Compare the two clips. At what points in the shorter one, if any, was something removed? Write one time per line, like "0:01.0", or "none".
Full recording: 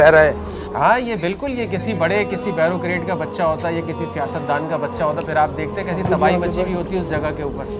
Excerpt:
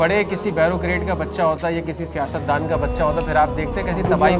none